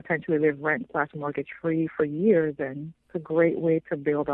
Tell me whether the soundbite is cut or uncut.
uncut